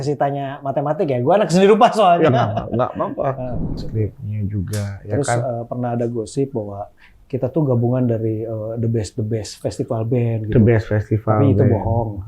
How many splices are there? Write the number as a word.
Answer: one